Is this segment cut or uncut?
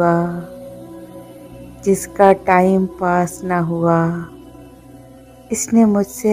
uncut